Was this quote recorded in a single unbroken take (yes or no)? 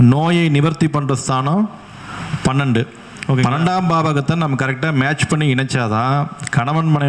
no